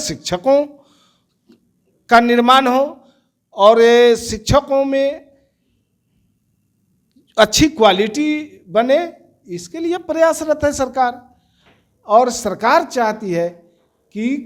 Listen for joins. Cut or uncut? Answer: uncut